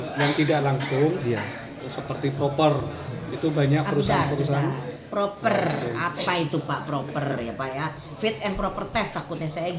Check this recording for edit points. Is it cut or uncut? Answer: uncut